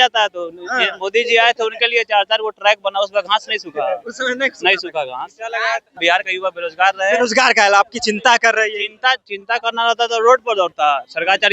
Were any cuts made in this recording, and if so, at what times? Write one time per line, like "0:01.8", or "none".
0:05.9